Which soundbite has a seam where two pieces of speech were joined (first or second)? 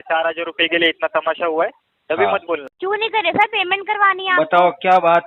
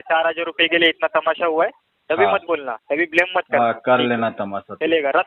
first